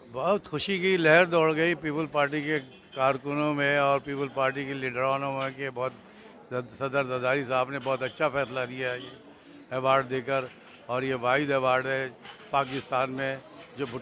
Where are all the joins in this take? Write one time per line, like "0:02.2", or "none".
none